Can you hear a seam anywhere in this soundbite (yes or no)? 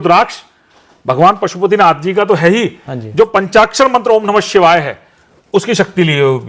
no